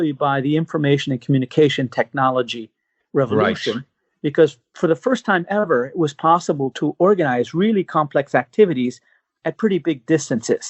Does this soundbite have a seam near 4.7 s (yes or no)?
yes